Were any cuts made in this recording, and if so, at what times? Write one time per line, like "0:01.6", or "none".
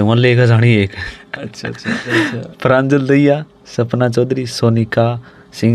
0:02.0